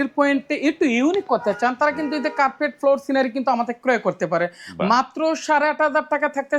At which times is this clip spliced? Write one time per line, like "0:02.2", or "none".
none

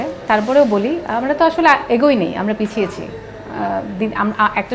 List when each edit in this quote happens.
none

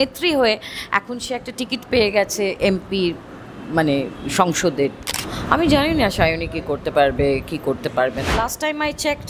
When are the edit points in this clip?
0:05.1
0:08.3

